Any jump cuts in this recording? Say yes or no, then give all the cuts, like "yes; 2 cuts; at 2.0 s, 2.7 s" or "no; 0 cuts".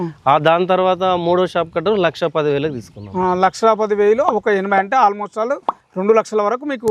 no; 0 cuts